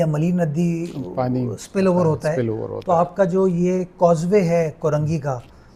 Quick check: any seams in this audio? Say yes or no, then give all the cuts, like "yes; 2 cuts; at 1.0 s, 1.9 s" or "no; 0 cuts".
no; 0 cuts